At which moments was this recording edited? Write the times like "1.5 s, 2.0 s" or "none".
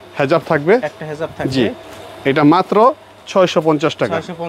none